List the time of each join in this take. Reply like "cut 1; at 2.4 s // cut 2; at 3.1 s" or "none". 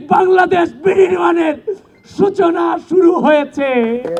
none